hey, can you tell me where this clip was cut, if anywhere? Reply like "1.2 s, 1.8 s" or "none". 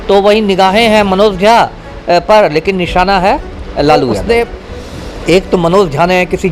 4.2 s

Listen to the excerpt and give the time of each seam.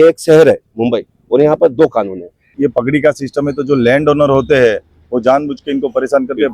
2.5 s

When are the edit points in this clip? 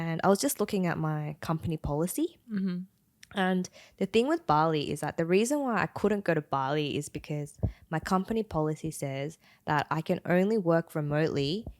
none

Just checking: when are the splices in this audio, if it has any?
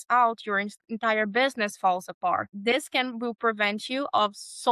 none

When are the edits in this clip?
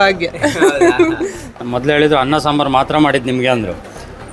1.6 s

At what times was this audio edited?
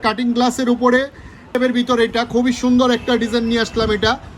1.5 s

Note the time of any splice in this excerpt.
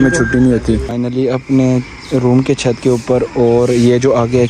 0.9 s

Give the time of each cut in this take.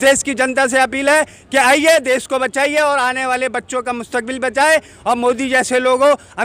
none

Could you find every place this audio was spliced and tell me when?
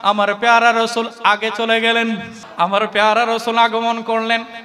2.4 s

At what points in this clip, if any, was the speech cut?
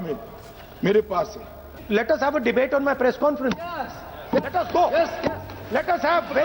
1.7 s

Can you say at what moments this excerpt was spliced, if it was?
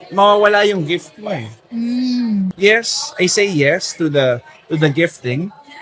2.5 s

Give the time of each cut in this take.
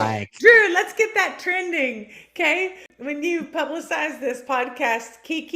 2.9 s

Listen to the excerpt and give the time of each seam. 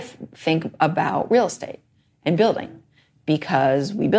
none

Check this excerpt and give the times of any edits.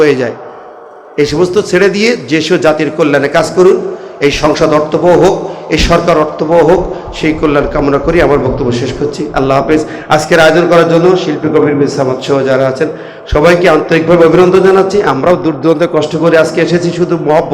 none

